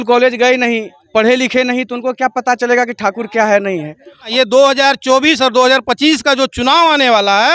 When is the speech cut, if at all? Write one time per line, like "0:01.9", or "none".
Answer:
0:04.3